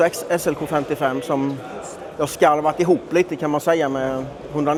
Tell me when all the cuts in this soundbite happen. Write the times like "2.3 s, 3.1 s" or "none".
none